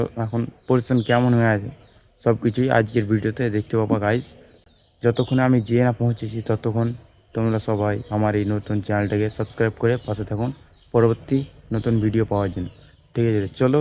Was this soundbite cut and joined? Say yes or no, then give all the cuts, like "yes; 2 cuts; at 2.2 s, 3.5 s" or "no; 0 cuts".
no; 0 cuts